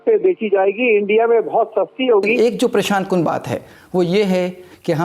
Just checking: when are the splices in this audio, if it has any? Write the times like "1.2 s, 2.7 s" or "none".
2.3 s